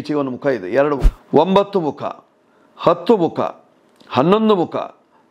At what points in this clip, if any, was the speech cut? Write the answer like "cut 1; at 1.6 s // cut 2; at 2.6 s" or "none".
cut 1; at 1.1 s